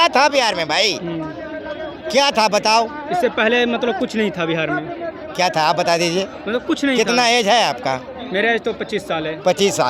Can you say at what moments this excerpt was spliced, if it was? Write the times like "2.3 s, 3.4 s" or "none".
none